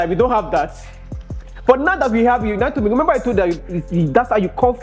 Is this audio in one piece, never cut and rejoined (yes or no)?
yes